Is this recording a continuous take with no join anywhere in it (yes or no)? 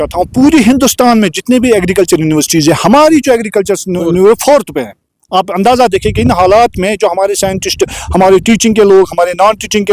yes